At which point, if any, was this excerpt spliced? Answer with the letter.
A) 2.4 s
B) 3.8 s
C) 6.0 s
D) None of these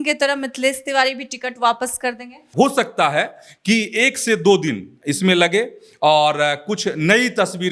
A